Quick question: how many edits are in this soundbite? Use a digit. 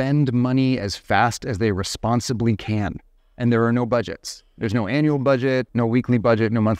1